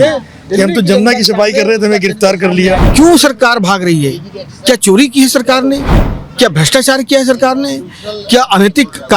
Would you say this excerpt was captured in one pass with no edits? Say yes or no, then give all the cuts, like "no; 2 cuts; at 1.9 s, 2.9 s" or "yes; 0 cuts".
no; 1 cut; at 2.9 s